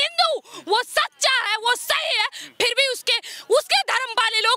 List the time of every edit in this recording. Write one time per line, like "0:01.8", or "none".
none